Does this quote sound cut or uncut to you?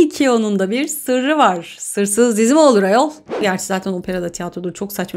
cut